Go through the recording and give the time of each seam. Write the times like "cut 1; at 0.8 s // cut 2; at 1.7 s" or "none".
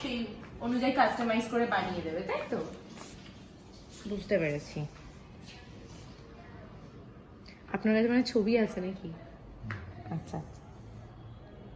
none